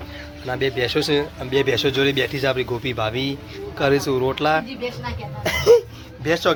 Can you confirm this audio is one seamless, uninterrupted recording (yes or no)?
yes